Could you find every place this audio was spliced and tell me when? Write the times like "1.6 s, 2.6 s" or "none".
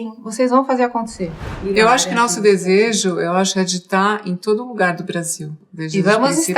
1.4 s, 5.6 s